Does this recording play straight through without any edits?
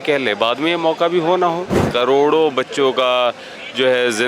no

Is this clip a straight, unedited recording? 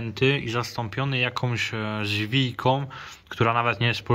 yes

